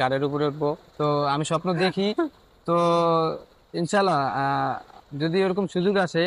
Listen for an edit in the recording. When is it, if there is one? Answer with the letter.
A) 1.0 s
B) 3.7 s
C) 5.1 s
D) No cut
A